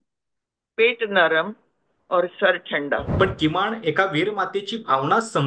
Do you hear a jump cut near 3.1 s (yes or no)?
yes